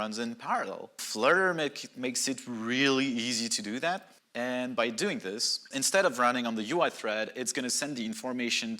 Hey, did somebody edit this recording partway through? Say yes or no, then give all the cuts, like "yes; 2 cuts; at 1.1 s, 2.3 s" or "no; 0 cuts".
yes; 3 cuts; at 1.0 s, 4.2 s, 5.7 s